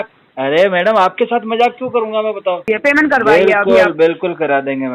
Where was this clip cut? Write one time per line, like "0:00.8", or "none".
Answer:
0:02.6